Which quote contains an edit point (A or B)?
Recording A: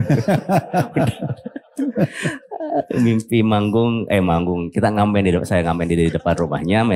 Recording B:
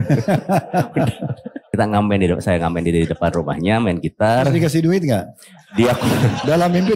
B